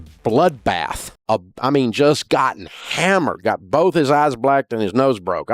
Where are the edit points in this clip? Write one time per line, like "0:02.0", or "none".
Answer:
none